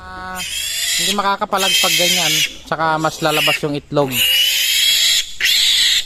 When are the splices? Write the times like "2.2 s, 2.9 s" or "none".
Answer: none